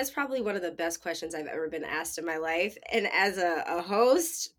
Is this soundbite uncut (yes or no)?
yes